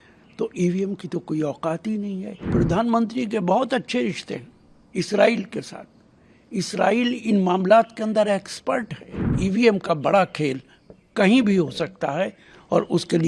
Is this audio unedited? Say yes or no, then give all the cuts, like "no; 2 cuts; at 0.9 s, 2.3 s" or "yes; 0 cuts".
no; 2 cuts; at 2.5 s, 9.4 s